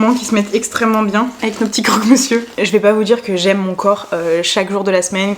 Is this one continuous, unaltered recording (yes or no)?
no